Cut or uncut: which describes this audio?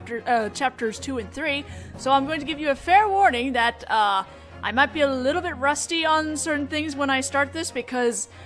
cut